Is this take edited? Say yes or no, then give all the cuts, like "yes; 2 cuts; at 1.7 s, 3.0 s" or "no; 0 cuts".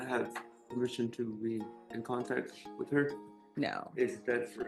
no; 0 cuts